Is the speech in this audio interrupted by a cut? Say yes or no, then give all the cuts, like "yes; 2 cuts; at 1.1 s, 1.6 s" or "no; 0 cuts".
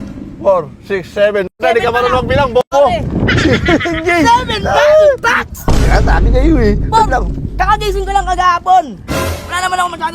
no; 0 cuts